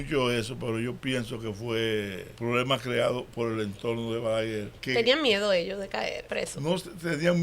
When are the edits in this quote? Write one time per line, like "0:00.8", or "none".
0:02.3
0:04.7
0:06.2